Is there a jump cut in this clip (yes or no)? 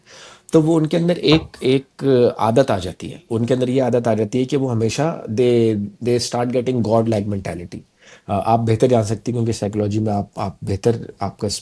no